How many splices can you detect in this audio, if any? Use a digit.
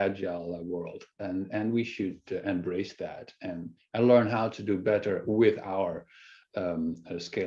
0